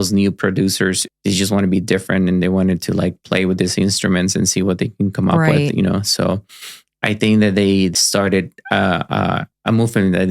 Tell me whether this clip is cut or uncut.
cut